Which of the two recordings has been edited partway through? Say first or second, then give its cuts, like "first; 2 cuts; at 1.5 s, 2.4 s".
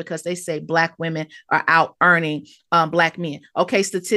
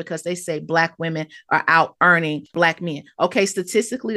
second; 1 cut; at 2.5 s